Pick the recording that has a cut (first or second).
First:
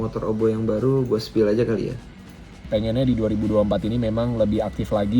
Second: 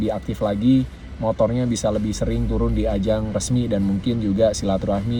first